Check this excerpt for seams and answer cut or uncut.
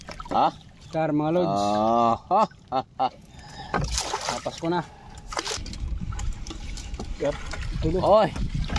cut